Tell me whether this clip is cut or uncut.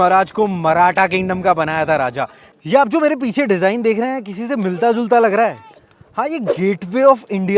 cut